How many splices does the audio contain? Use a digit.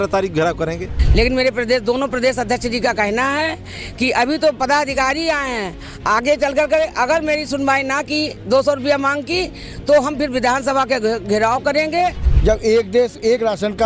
2